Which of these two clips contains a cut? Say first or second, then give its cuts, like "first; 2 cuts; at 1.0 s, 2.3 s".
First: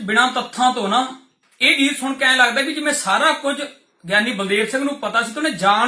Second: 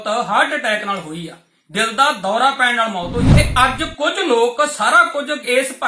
second; 1 cut; at 3.3 s